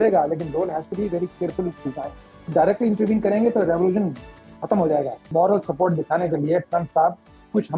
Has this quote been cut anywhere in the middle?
yes; 2 cuts; at 2.4 s, 5.2 s

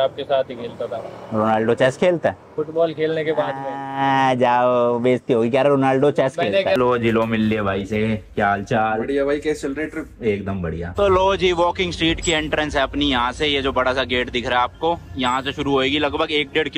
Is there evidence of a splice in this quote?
yes; 2 cuts; at 6.8 s, 11.0 s

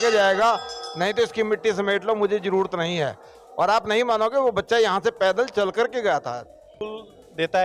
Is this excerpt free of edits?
no; 1 cut; at 6.7 s

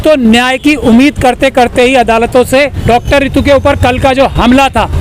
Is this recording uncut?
no; 1 cut; at 2.8 s

